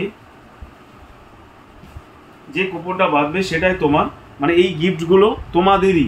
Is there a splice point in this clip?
no; 0 cuts

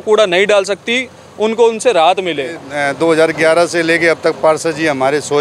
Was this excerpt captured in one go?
no; 1 cut; at 2.7 s

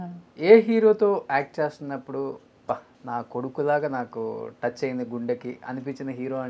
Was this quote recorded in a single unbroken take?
no; 1 cut; at 2.9 s

